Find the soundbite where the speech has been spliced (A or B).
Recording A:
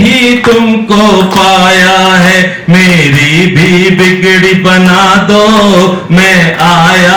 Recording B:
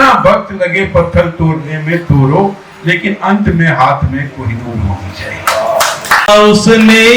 B